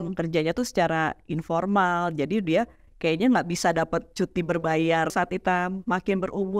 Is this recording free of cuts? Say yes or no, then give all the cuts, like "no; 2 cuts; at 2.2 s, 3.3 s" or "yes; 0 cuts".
no; 1 cut; at 5.1 s